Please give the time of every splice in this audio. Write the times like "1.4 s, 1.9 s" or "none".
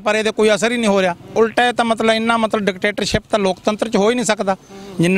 1.3 s